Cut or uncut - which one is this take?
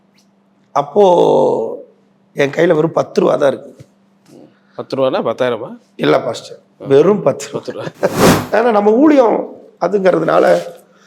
cut